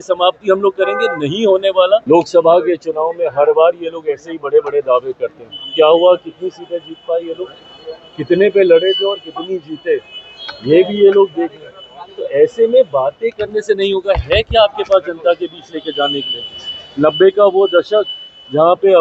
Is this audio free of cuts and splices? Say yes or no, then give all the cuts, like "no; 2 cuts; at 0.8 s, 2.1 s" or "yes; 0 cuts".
no; 1 cut; at 2.0 s